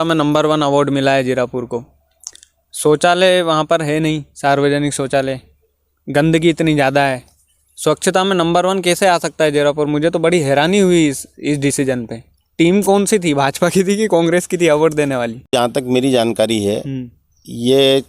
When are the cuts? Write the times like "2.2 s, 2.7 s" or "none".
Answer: 15.5 s